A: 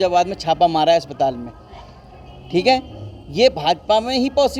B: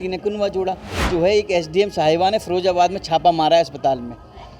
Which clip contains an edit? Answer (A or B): B